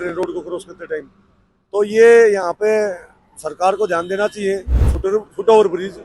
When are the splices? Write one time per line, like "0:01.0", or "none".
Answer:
0:04.9